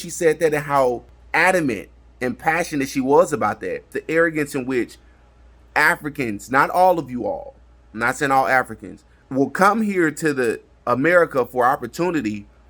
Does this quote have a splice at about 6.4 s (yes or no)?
no